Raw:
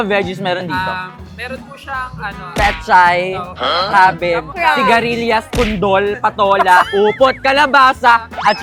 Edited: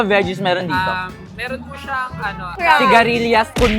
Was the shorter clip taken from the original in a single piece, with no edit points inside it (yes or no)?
no